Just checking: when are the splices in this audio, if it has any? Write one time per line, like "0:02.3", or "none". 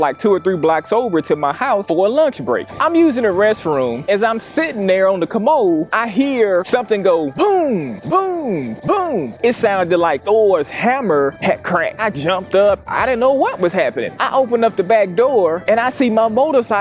none

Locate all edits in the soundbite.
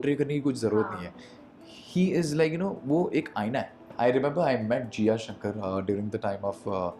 0:03.8

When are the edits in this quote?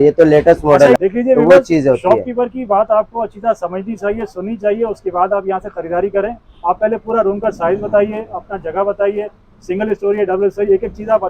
0:01.0

